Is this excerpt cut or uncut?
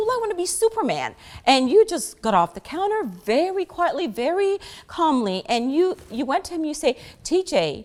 uncut